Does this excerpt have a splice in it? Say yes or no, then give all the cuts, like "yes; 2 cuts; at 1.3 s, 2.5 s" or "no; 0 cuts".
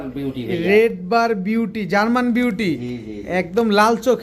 no; 0 cuts